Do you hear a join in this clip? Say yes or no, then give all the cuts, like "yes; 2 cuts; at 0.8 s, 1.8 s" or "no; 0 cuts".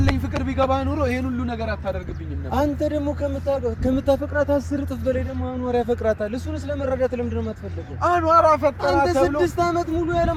no; 0 cuts